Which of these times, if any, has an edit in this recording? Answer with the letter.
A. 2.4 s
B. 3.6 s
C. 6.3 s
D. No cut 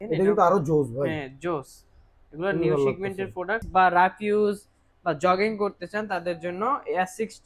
B